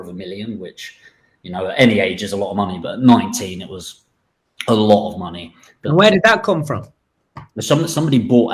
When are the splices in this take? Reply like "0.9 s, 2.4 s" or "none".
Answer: none